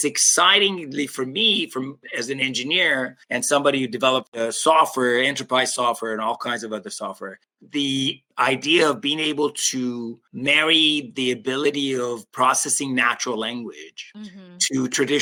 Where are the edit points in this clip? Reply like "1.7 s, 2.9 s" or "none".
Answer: none